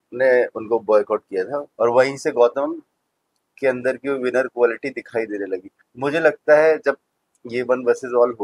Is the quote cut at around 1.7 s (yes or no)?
yes